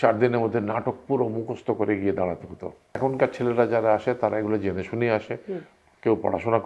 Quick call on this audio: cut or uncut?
cut